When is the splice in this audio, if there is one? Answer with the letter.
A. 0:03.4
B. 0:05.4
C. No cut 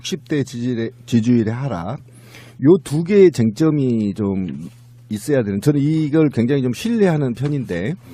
A